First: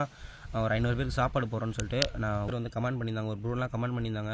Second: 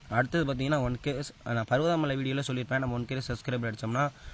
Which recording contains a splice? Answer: first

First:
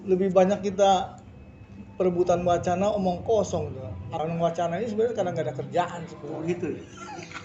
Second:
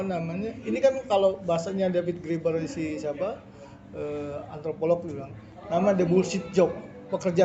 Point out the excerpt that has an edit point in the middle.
first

